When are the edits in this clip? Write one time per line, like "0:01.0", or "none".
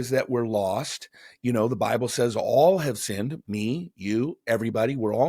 none